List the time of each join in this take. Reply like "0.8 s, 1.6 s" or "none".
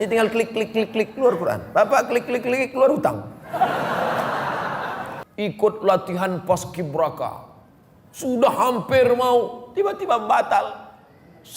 5.2 s